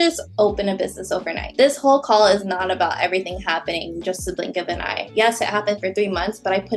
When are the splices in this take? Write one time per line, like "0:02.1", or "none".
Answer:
none

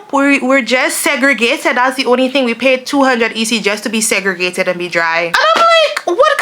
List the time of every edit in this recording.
0:05.3

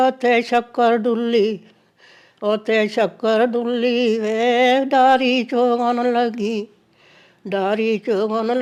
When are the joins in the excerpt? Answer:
none

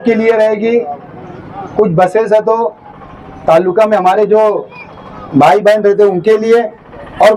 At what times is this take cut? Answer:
none

